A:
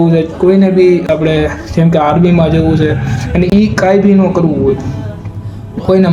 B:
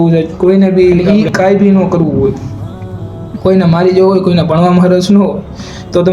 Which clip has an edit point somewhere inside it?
B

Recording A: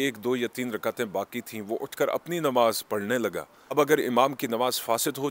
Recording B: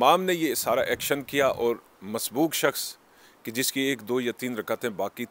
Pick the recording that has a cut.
A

